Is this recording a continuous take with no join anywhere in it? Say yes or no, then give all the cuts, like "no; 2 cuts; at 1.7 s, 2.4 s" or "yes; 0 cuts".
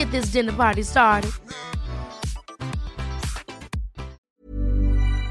no; 1 cut; at 4.2 s